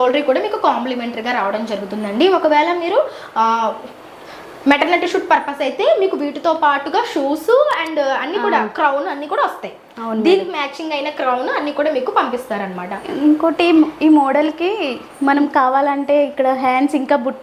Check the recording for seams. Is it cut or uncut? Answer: uncut